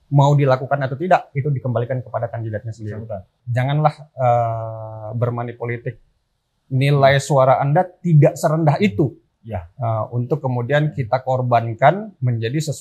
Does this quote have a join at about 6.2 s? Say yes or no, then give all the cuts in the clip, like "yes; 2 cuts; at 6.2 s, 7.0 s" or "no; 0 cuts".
no; 1 cut; at 3.4 s